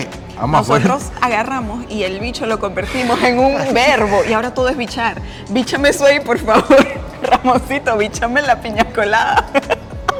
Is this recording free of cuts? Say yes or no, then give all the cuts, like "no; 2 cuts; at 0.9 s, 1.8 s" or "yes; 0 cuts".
yes; 0 cuts